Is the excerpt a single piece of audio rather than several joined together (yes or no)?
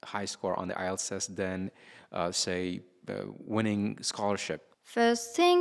no